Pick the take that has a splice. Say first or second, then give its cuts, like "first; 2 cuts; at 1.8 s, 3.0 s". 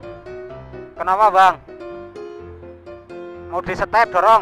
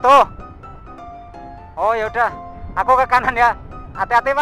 first; 3 cuts; at 0.9 s, 1.6 s, 3.5 s